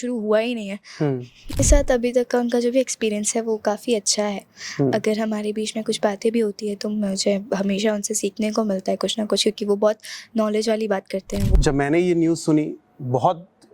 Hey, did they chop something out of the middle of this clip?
yes; 2 cuts; at 1.6 s, 11.5 s

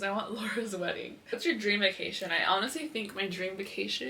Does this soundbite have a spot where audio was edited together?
yes; 1 cut; at 1.1 s

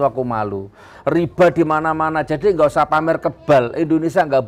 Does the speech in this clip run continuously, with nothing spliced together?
no; 1 cut; at 1.0 s

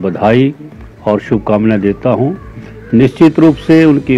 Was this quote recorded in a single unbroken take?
yes; 0 cuts

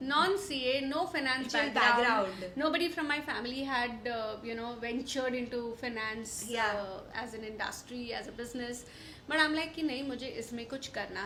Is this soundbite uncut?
yes; 0 cuts

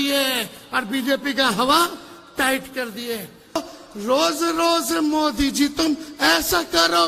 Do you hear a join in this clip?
yes; 1 cut; at 3.7 s

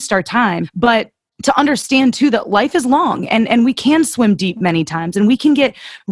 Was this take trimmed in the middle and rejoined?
yes; 1 cut; at 0.9 s

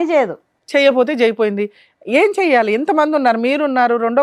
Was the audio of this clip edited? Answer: no; 0 cuts

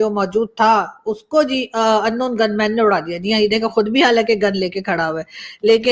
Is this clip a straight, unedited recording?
yes; 0 cuts

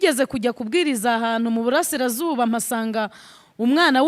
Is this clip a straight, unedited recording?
yes; 0 cuts

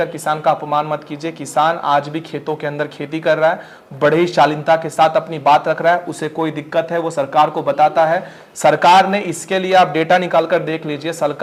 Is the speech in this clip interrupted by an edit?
no; 0 cuts

